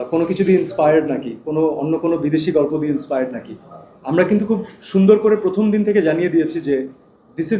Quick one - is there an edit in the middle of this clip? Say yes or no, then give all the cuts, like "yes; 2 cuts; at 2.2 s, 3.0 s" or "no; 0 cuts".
no; 0 cuts